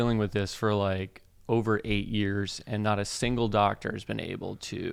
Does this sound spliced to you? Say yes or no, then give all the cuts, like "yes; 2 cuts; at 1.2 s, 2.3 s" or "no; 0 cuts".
no; 0 cuts